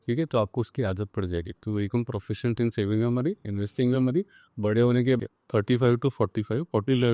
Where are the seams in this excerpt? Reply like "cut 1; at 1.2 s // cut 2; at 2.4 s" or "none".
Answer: cut 1; at 5.2 s